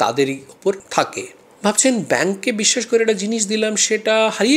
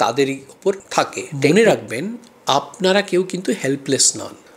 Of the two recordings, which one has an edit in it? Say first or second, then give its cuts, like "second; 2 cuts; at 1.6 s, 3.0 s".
second; 1 cut; at 1.2 s